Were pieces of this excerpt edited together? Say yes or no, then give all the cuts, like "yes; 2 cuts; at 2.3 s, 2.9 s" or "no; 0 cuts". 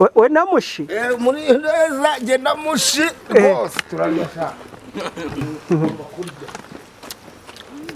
yes; 1 cut; at 5.5 s